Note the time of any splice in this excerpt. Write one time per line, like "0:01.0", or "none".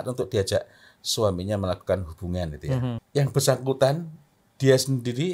0:03.0